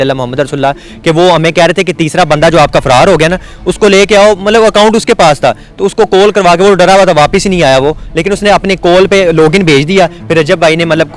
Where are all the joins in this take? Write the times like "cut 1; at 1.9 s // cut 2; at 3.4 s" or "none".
none